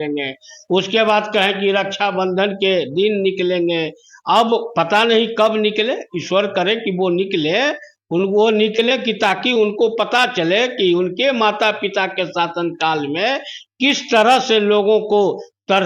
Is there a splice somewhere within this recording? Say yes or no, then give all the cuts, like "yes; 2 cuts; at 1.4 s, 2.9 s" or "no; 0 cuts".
no; 0 cuts